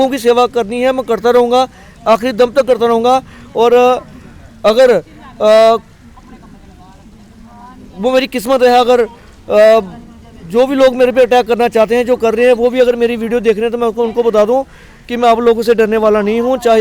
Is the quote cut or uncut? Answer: uncut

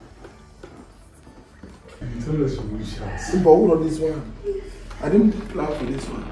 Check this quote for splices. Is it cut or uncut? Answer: cut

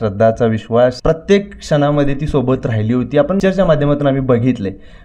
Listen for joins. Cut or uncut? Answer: cut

